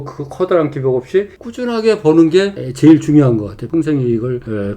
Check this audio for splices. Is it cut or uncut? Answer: cut